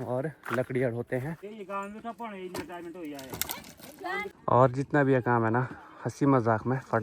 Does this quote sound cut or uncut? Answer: cut